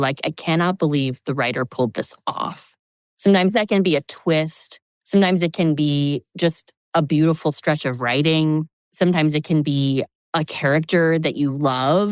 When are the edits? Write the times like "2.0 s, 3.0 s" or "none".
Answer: 6.7 s, 8.8 s, 10.2 s